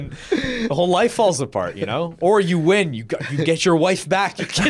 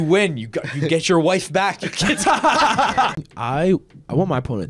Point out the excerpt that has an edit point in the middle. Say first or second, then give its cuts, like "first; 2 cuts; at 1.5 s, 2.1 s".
second; 1 cut; at 3.3 s